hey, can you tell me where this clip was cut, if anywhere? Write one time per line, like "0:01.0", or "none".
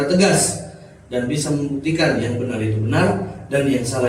none